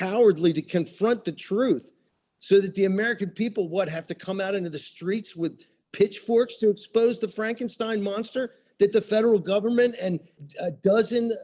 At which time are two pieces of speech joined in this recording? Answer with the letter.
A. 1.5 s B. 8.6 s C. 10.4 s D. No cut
C